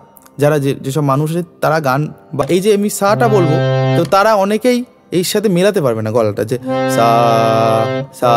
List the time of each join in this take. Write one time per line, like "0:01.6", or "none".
0:02.4

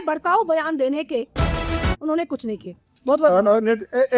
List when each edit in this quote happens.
0:01.6

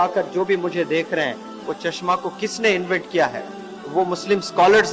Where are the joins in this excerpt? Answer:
none

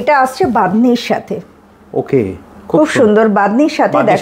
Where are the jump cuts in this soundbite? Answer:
none

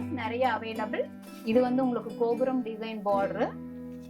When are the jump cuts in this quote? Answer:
0:01.1

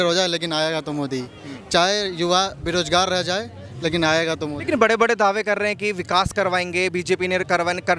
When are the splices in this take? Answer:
none

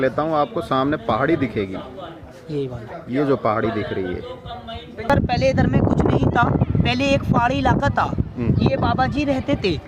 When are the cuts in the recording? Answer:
0:05.1

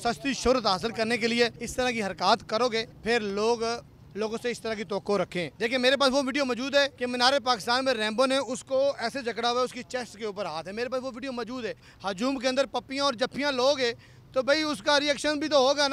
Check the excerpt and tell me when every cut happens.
0:01.6
0:02.9
0:05.5
0:07.0
0:11.9

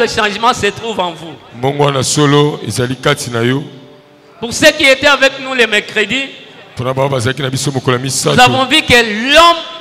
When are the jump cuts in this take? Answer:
none

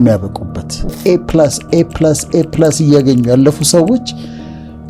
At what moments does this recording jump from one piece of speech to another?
0:00.9

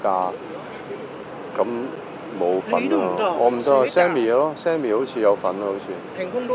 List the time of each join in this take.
none

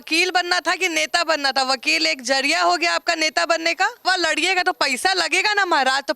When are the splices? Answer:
0:04.0

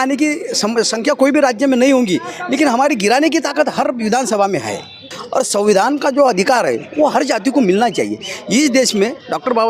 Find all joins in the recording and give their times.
0:05.0

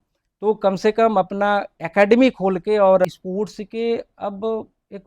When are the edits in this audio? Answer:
0:03.1

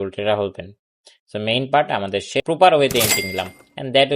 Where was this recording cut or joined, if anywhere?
0:02.4

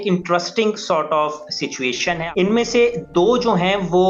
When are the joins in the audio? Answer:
0:02.2

